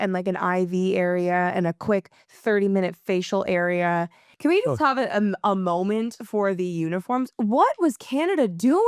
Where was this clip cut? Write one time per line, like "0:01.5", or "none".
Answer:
0:04.2